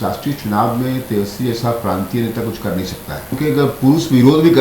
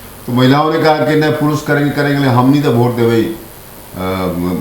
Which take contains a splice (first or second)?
first